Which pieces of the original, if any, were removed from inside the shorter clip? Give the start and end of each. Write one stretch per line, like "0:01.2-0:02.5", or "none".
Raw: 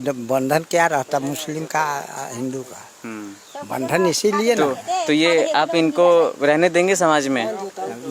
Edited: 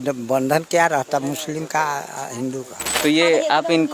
0:03.0-0:05.0